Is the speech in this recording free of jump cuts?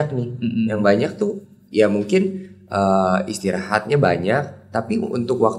yes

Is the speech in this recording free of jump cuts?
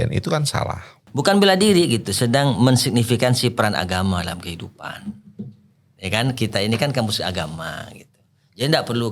no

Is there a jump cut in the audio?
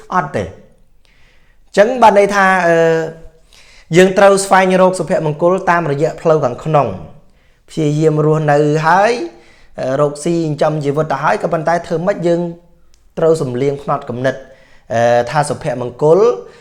no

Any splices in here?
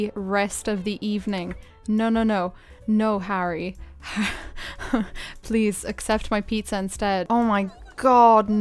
yes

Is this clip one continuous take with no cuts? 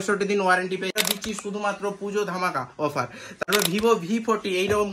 no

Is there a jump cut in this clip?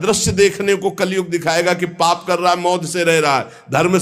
no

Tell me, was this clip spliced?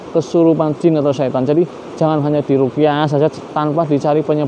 no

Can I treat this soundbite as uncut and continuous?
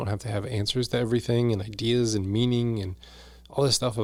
yes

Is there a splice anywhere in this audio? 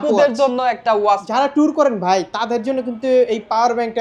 yes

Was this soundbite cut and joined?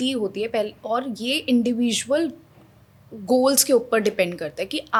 no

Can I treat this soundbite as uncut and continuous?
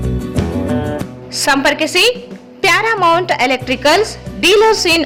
yes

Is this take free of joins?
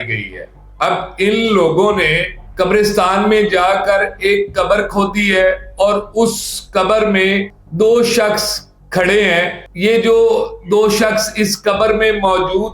yes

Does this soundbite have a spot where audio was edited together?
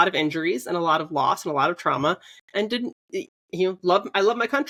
no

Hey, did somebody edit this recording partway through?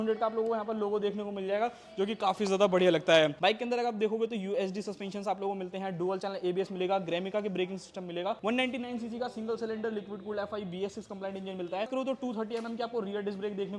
yes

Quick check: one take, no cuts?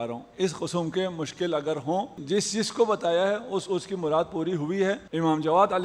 no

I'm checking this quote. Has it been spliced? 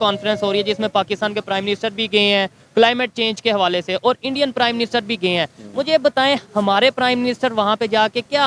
no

